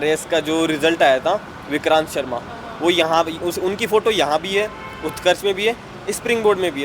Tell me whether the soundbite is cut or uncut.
uncut